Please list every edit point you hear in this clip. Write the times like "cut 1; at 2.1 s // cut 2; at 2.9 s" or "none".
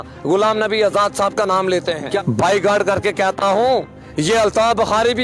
cut 1; at 2.2 s